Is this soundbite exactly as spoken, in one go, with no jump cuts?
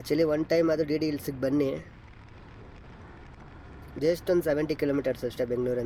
yes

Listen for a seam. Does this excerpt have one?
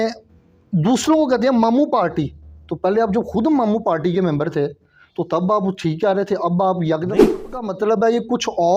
yes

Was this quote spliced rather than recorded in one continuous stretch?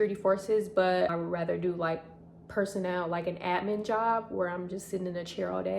yes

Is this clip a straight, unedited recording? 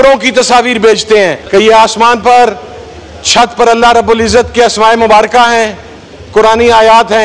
no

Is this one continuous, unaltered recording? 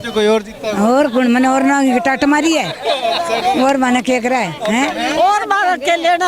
yes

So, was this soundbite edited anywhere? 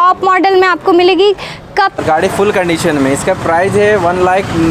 yes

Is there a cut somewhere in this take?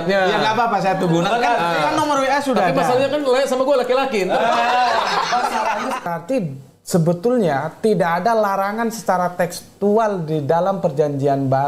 yes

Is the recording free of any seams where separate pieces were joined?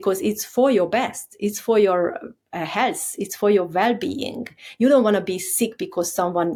yes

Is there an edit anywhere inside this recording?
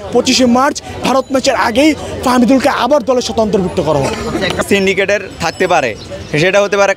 yes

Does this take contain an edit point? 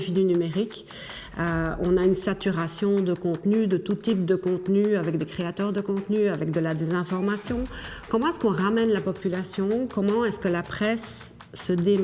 no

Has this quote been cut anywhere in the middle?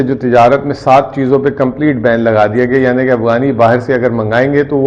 no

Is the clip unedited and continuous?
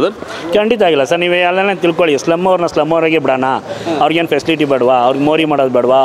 yes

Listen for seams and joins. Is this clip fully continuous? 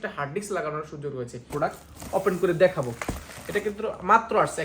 no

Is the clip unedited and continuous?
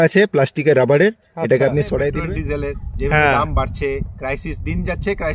no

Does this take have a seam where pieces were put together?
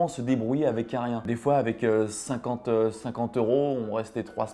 yes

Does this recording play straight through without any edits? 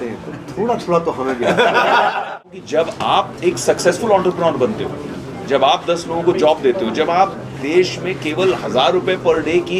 no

